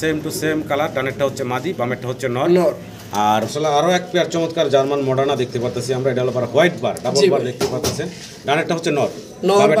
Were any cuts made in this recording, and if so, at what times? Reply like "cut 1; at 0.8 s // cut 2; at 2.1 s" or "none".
cut 1; at 3.5 s